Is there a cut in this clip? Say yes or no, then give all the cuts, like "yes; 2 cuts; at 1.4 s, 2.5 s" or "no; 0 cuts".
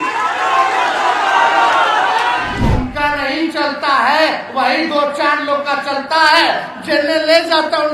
yes; 1 cut; at 2.6 s